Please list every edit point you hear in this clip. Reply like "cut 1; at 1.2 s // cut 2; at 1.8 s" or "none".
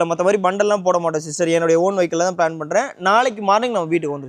none